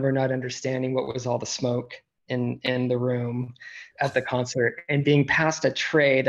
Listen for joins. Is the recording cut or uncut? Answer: cut